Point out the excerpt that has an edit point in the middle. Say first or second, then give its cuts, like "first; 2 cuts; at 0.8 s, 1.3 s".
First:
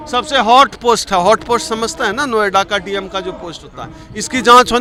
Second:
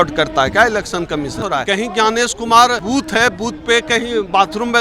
second; 2 cuts; at 1.5 s, 2.8 s